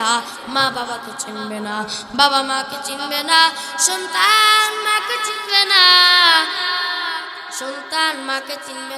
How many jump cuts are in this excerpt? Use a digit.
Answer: 0